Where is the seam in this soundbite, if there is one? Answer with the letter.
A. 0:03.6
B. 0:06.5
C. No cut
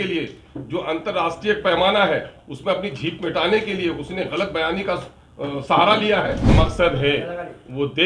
B